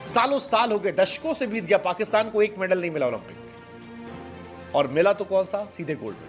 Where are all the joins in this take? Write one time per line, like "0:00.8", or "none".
none